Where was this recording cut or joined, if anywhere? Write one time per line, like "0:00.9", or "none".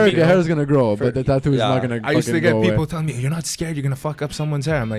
none